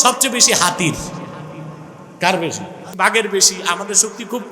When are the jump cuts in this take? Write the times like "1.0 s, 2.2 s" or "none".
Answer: 2.9 s